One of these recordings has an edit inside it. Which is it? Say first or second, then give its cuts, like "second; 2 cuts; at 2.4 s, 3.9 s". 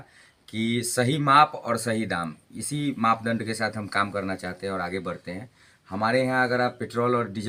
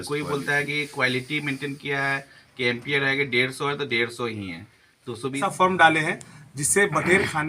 second; 1 cut; at 5.4 s